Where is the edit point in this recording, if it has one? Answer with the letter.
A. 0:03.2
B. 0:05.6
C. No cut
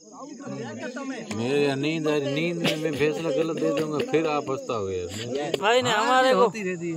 B